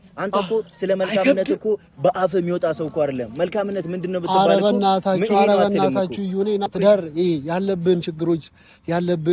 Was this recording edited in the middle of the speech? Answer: yes; 1 cut; at 6.7 s

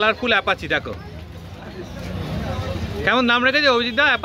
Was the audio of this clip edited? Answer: no; 0 cuts

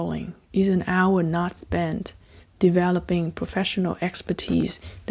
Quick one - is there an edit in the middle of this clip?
no; 0 cuts

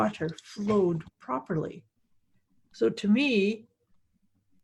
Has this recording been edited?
no; 0 cuts

